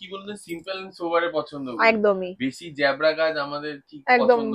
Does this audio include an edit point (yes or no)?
no